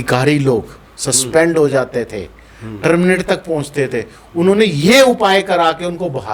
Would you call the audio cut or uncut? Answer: uncut